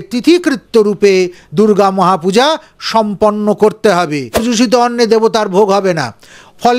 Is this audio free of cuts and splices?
no; 1 cut; at 4.4 s

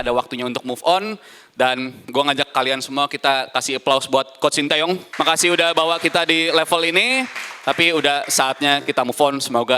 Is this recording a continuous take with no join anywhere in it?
no; 1 cut; at 5.1 s

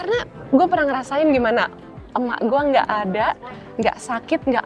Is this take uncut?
yes; 0 cuts

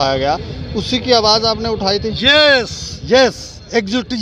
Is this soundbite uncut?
yes; 0 cuts

